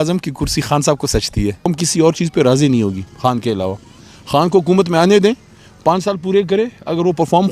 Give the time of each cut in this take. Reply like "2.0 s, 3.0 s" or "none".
1.7 s